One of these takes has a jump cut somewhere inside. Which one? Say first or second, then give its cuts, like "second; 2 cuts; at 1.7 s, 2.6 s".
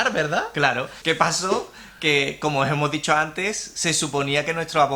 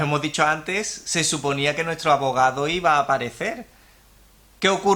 first; 1 cut; at 1.0 s